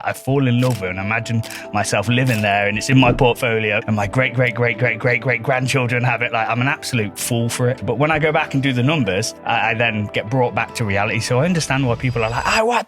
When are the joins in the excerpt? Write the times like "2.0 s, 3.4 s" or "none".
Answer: 3.8 s, 7.8 s, 9.3 s